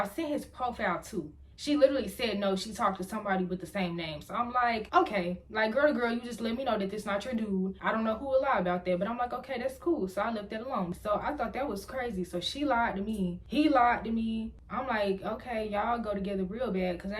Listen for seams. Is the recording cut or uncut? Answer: cut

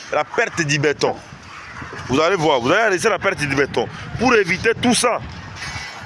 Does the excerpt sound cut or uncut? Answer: uncut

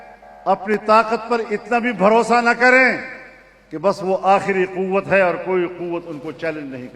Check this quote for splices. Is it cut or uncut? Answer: uncut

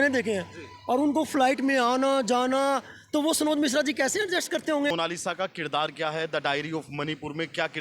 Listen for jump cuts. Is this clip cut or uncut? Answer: cut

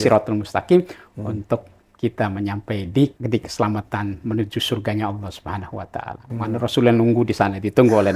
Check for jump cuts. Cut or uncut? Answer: cut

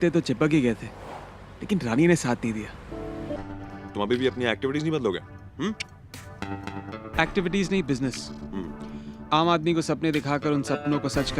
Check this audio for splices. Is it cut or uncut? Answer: cut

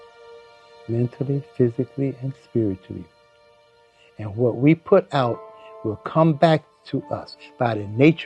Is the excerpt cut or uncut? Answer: uncut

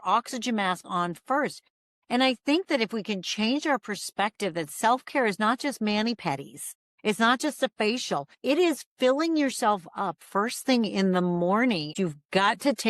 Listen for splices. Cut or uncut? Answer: cut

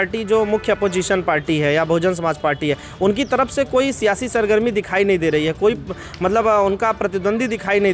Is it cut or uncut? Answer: uncut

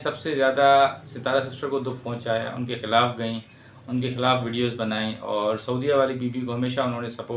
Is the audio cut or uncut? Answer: uncut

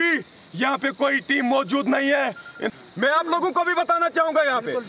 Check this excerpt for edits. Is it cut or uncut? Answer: cut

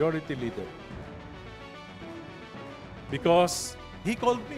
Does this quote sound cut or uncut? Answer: uncut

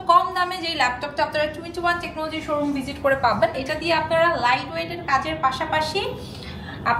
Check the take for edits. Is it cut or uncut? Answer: cut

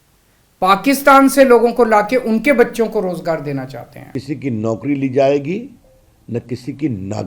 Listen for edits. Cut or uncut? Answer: cut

